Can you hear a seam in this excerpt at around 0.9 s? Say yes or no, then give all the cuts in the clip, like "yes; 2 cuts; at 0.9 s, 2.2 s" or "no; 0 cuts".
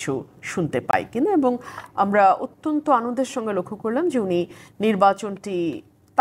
no; 0 cuts